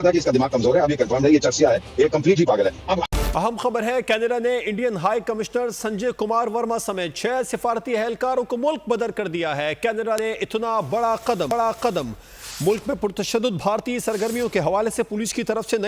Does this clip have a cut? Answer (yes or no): yes